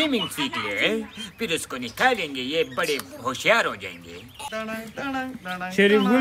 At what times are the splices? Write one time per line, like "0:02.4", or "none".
0:04.5